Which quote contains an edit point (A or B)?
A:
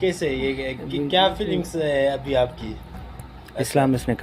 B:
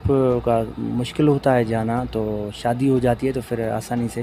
A